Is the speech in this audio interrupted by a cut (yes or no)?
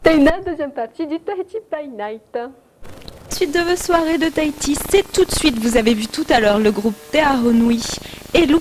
yes